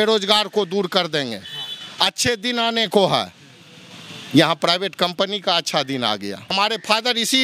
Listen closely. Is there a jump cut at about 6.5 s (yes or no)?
yes